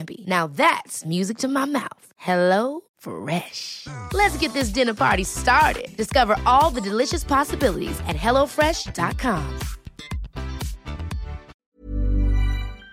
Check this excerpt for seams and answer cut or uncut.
cut